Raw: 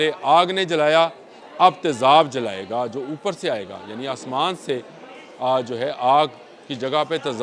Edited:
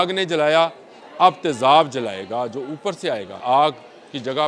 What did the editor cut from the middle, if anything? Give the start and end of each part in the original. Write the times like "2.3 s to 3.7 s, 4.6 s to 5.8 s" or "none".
3.8 s to 6.0 s